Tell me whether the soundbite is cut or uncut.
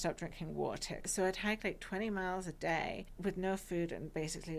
cut